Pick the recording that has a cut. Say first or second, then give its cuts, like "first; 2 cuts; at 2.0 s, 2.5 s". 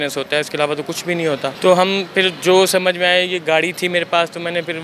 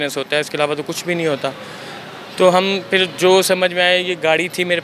first; 1 cut; at 1.6 s